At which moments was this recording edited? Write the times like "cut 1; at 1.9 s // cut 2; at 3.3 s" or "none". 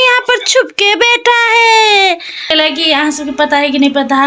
cut 1; at 2.3 s